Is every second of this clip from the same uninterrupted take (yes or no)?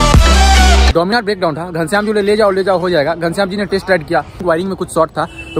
no